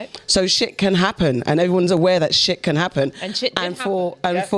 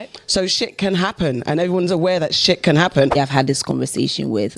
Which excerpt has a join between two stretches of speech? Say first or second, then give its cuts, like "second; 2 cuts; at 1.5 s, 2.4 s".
second; 1 cut; at 3.2 s